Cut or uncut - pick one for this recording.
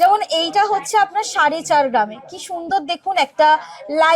uncut